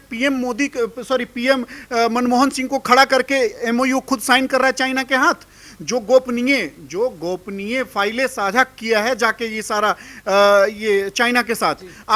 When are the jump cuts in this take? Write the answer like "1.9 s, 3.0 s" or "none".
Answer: none